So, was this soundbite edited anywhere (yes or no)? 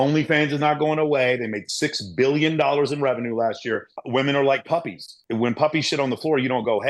yes